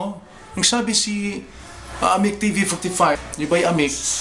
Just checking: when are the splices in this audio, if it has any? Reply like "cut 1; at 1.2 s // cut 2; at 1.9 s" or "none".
cut 1; at 3.3 s